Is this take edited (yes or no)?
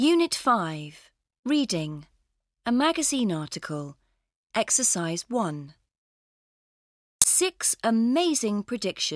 no